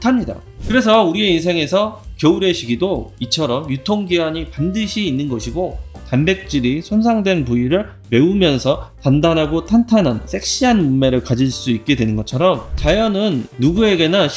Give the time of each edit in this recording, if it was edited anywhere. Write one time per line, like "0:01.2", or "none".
0:06.0